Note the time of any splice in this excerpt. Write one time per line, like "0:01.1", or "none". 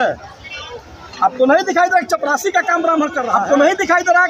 0:03.3